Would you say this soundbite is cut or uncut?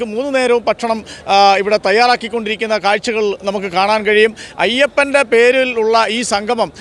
cut